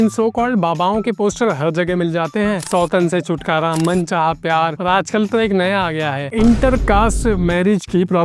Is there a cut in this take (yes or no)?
no